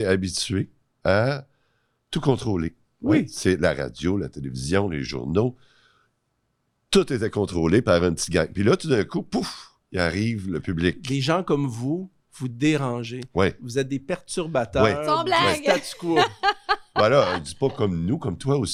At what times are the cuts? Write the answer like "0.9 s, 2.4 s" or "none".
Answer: none